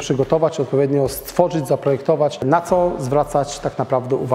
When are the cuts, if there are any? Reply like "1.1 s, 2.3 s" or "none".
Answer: 2.4 s